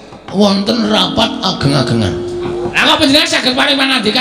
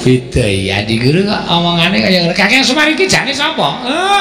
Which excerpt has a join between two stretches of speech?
first; 1 cut; at 2.8 s

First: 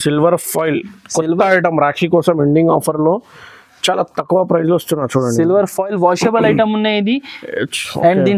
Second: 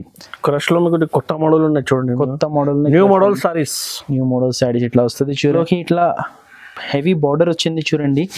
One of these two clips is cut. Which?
second; 1 cut; at 5.5 s

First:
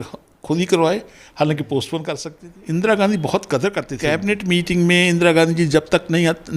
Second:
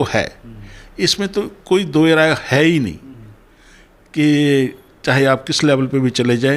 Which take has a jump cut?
first; 2 cuts; at 2.3 s, 3.9 s

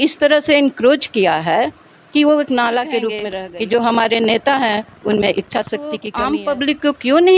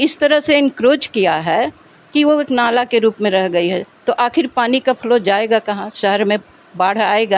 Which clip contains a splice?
first; 2 cuts; at 3.3 s, 6.1 s

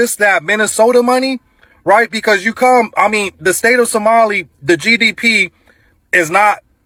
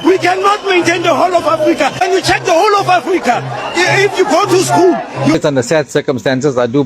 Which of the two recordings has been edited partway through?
second; 1 cut; at 5.4 s

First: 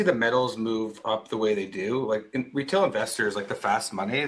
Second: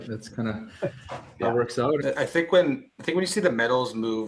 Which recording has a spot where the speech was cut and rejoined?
second; 1 cut; at 2.0 s

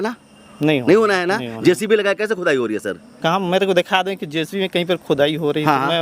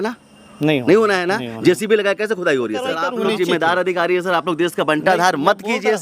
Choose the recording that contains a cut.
second; 1 cut; at 3.0 s

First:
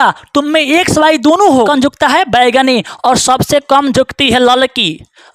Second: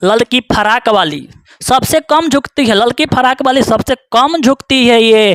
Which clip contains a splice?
first; 1 cut; at 1.7 s

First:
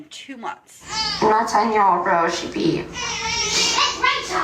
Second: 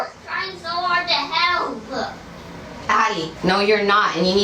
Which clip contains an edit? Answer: first; 1 cut; at 0.9 s

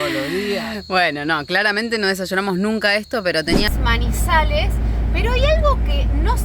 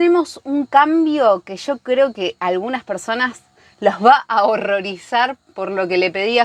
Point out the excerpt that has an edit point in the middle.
first; 1 cut; at 3.7 s

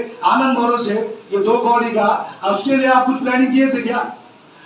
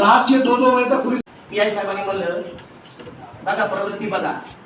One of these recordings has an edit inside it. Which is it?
second; 1 cut; at 1.2 s

